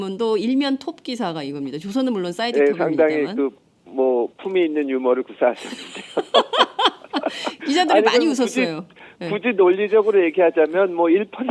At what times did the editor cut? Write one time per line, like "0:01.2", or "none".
none

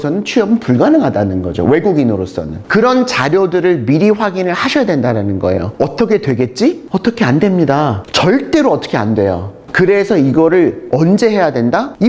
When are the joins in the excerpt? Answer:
none

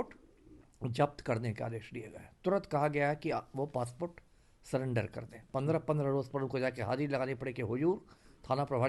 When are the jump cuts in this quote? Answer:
0:05.4

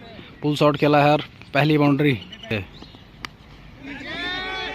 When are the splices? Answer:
0:02.5

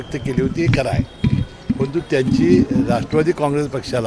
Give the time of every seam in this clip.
none

